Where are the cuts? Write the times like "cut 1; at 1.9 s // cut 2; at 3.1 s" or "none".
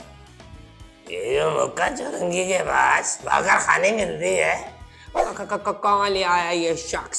cut 1; at 5.2 s